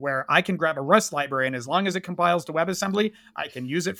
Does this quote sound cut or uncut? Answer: uncut